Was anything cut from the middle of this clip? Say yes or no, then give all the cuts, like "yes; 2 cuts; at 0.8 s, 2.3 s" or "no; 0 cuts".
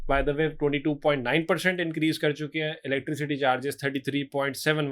no; 0 cuts